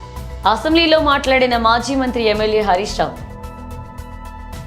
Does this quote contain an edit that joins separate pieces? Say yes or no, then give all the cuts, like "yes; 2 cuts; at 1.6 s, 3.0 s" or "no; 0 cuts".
no; 0 cuts